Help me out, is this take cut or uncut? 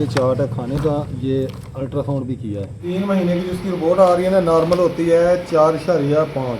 cut